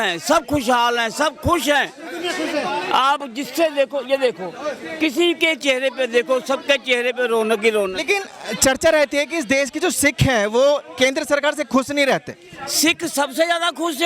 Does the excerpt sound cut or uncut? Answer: uncut